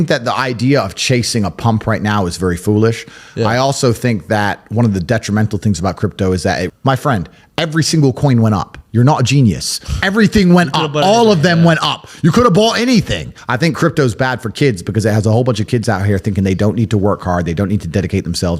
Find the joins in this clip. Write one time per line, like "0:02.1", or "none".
0:06.7
0:13.3